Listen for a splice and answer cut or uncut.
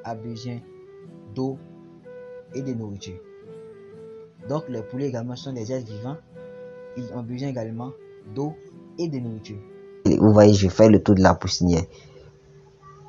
cut